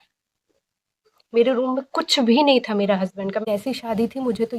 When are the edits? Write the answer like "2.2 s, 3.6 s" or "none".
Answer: 3.4 s